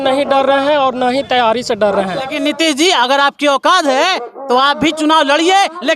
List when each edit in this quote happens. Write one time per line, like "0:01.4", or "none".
0:02.3